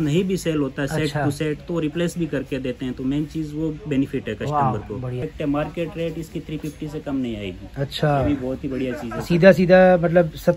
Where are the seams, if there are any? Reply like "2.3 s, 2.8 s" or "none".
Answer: 5.2 s